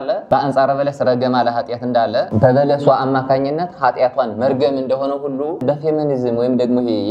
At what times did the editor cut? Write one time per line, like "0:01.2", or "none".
none